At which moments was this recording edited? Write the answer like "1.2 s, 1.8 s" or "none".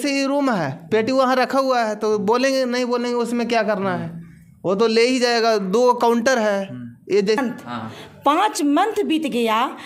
7.4 s